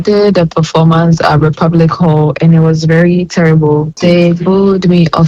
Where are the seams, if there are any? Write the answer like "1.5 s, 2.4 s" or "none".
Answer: 4.0 s